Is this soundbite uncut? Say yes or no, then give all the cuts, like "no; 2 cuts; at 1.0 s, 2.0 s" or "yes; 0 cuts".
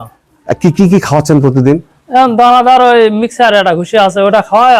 yes; 0 cuts